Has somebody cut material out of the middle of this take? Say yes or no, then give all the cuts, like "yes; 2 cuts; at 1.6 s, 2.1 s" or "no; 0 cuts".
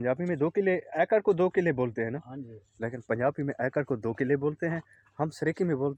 no; 0 cuts